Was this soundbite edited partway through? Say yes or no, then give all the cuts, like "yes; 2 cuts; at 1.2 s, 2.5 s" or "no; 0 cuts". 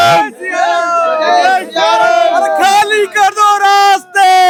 no; 0 cuts